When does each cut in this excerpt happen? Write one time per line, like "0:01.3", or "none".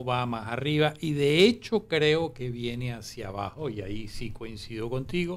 none